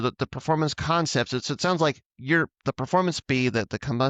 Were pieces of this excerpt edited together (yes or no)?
no